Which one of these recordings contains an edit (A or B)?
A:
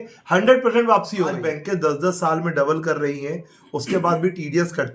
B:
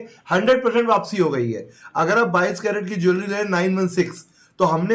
A